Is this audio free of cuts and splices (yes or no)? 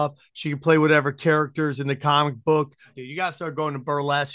no